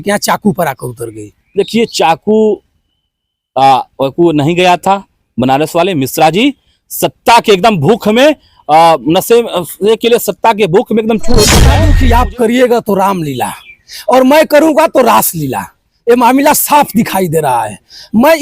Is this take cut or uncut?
cut